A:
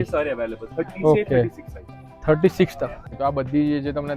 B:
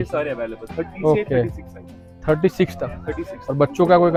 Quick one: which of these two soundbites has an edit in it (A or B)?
A